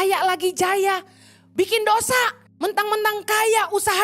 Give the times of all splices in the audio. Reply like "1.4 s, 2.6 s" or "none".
2.4 s